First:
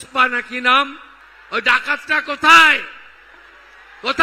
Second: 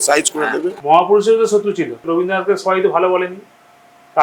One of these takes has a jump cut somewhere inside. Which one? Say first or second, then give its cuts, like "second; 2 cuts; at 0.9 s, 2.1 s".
second; 2 cuts; at 0.8 s, 2.0 s